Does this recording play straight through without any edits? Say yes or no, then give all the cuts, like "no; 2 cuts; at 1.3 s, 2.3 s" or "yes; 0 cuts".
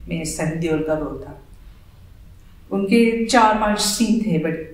yes; 0 cuts